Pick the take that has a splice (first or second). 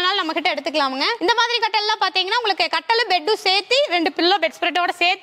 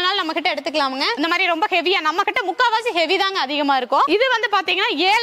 second